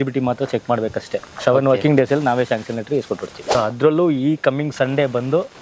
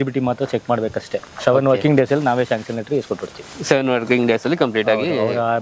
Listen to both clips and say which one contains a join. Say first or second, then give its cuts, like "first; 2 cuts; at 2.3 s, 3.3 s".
first; 1 cut; at 3.6 s